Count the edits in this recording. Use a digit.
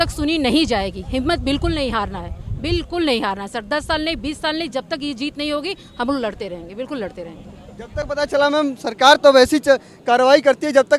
0